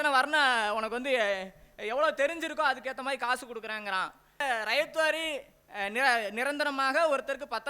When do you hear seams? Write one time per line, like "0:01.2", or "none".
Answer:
0:04.4